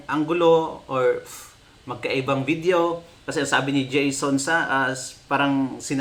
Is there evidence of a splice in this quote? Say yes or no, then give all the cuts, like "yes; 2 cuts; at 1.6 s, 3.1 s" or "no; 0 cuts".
no; 0 cuts